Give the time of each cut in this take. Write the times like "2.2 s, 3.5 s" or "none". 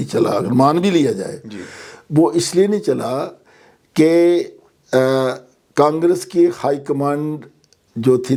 none